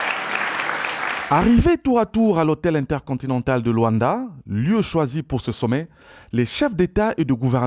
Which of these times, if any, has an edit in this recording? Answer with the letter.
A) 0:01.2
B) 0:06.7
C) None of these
A